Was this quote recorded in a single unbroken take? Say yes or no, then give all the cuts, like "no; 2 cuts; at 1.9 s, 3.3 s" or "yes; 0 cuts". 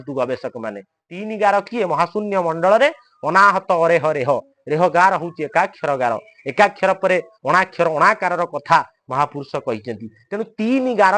yes; 0 cuts